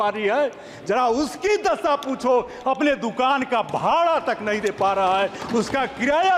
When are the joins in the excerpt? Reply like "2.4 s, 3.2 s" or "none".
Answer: none